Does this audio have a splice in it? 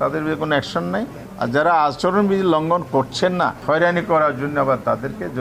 yes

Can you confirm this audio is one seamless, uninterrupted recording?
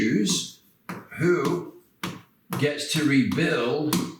yes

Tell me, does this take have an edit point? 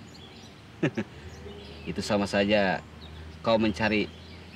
no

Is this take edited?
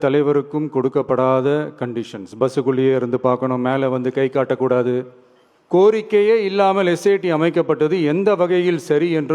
yes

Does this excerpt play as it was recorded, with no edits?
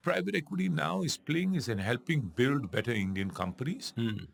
yes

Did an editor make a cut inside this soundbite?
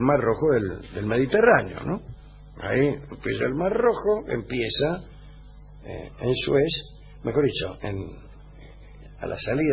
no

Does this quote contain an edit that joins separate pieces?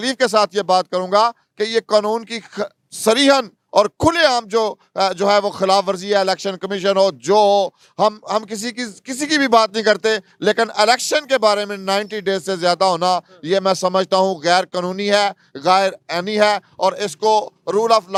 no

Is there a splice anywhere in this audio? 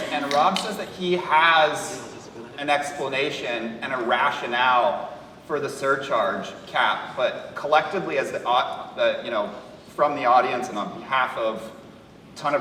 no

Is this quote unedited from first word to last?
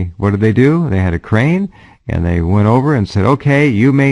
yes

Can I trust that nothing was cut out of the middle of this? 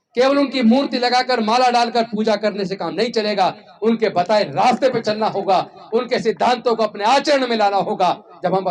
yes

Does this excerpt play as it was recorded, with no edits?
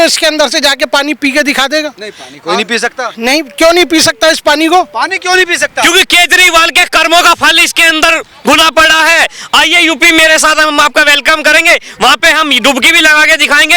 yes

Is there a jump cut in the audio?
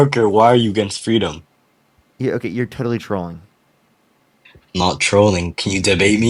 no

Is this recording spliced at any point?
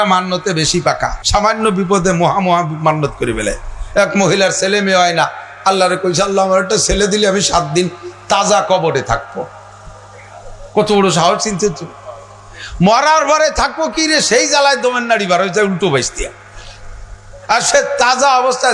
yes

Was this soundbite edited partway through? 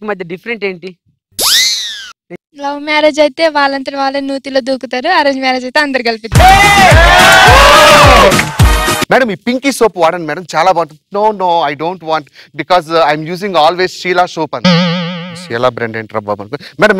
yes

